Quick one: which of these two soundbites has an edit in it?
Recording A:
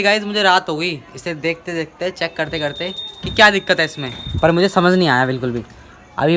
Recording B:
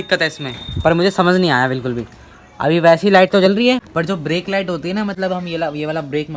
B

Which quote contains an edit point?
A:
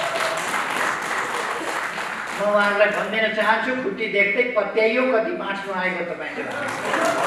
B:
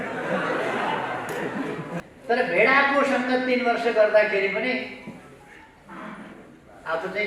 B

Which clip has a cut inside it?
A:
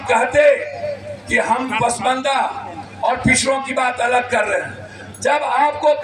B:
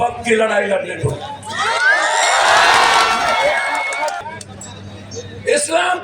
B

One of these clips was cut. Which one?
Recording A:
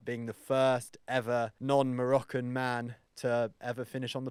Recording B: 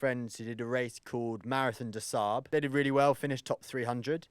B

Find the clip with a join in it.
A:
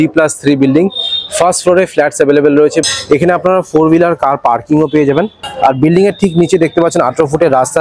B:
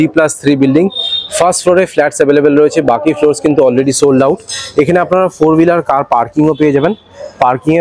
A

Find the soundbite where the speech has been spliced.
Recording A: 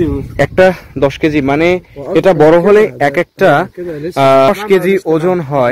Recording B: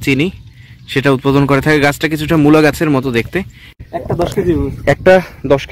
B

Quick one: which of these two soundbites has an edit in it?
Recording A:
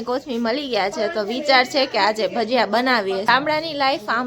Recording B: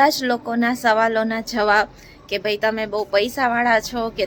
A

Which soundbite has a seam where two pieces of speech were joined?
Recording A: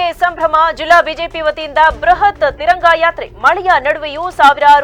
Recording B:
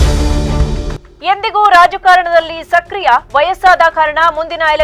B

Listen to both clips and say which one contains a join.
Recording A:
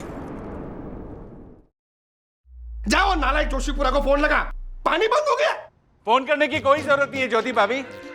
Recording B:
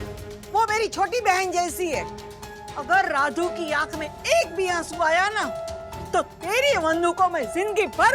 A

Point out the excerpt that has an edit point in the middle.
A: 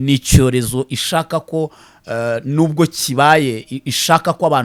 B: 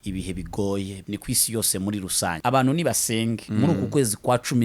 B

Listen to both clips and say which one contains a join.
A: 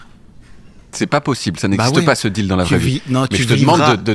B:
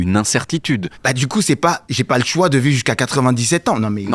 B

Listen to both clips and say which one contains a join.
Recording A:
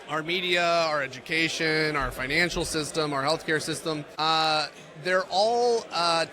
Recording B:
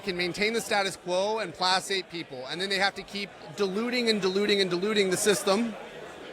A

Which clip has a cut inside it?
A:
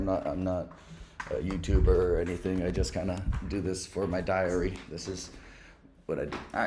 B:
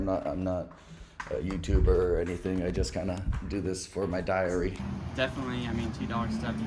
B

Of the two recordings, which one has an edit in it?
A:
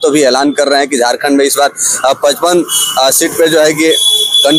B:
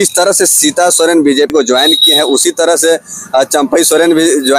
B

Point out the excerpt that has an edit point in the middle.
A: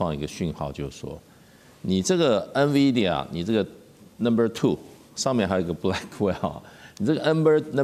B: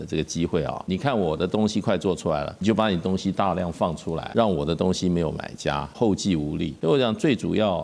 B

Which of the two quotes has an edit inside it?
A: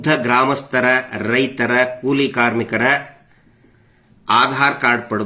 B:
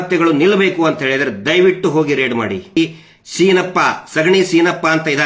B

